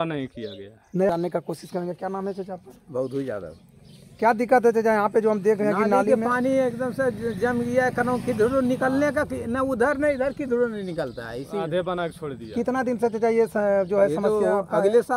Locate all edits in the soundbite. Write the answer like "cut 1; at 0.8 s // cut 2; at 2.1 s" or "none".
cut 1; at 1.1 s